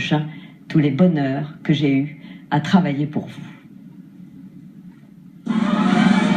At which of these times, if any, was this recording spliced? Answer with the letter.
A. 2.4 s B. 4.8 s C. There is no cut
B